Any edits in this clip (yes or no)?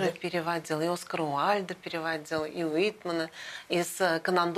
no